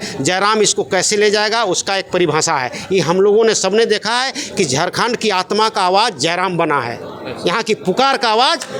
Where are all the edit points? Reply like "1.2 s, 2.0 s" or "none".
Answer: none